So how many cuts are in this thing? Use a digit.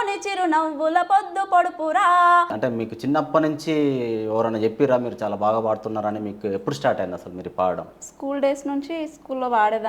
1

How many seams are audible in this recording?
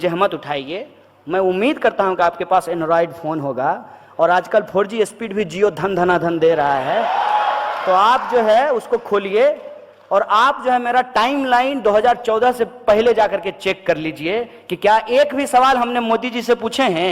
0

